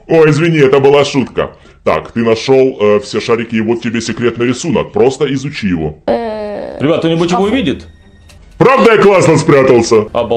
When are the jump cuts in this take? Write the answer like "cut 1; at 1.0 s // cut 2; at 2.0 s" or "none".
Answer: cut 1; at 6.0 s